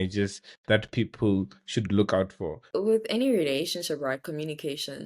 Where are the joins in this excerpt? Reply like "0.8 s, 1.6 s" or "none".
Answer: 2.7 s